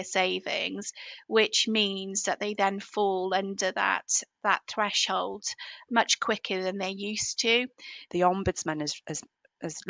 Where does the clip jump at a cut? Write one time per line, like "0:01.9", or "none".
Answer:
0:08.0